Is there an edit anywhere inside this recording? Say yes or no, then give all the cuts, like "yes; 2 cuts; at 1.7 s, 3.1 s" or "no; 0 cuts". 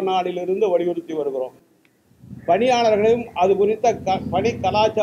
no; 0 cuts